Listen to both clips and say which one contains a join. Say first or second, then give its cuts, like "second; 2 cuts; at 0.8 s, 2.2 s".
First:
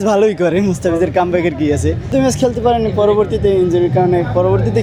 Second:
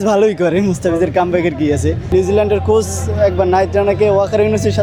second; 1 cut; at 2.0 s